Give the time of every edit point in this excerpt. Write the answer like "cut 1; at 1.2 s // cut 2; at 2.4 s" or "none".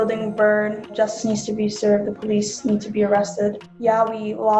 cut 1; at 0.9 s // cut 2; at 3.6 s